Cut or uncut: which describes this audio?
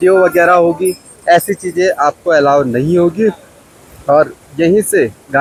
uncut